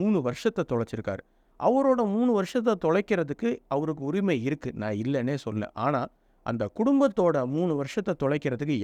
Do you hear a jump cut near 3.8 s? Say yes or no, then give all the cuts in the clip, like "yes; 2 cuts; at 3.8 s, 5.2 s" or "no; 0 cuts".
no; 0 cuts